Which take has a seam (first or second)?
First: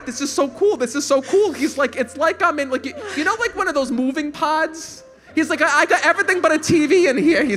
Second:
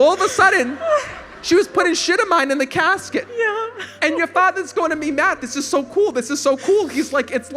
second